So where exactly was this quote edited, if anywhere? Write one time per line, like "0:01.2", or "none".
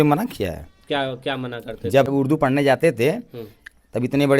0:02.1